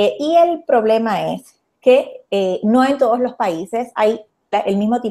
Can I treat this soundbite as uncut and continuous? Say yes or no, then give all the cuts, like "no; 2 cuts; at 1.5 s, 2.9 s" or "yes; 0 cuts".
no; 1 cut; at 3.1 s